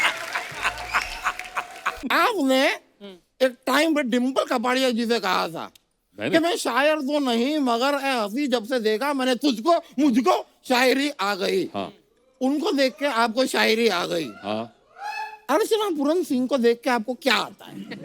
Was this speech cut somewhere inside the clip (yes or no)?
yes